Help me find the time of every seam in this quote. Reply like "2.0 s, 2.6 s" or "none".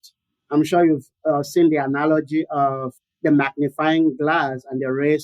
3.0 s